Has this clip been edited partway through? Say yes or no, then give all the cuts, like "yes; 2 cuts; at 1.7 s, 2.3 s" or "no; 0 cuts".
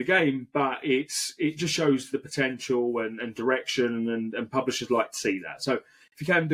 no; 0 cuts